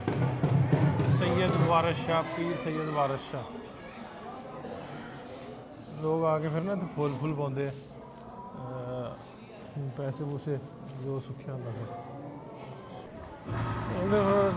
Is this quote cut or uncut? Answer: cut